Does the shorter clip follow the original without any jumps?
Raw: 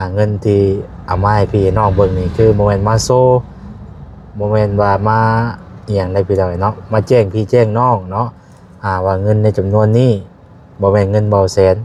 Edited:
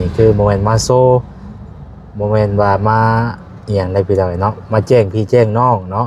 yes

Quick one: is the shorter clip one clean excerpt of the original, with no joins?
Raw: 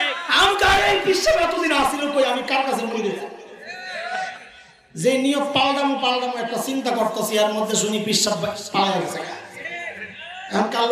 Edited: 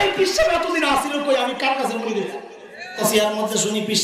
no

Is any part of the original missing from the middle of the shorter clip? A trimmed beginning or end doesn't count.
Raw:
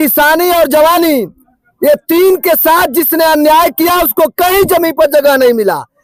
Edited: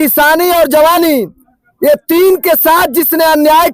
no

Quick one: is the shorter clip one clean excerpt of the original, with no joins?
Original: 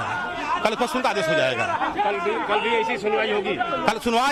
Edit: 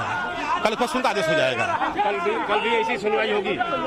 yes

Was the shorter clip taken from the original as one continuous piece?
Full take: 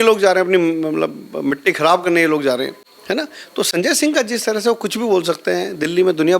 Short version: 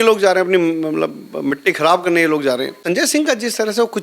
no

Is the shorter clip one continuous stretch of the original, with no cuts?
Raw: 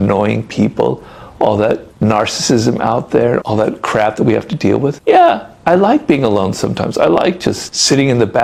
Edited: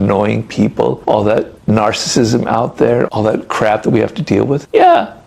no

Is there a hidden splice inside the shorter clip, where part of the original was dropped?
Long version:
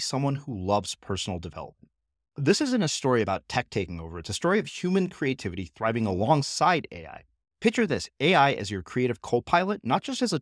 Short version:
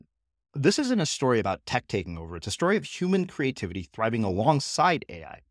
no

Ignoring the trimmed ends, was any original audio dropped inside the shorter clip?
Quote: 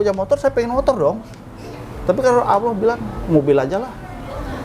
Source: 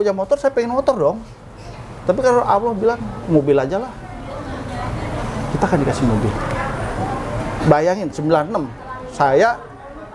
no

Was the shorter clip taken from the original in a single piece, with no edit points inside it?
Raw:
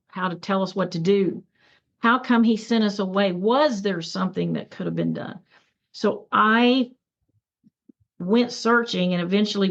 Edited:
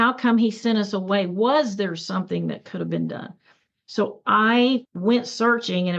no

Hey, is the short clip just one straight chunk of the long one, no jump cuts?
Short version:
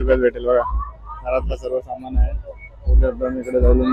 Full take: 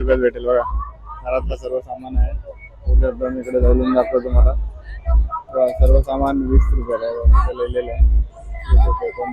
yes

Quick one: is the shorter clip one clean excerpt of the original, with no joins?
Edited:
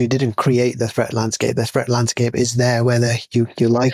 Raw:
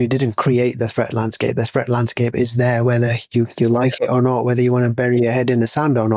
yes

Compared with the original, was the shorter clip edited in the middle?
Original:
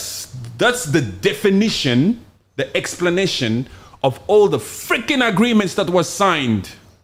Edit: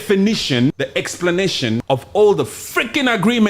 yes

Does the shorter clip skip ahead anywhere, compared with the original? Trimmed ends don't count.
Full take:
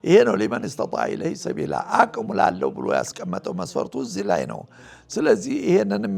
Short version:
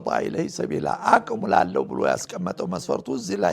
no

